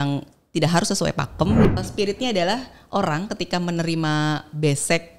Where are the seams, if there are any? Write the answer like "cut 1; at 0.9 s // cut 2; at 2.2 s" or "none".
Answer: cut 1; at 1.7 s